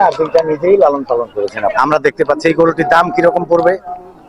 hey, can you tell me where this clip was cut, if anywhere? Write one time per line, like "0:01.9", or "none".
0:01.7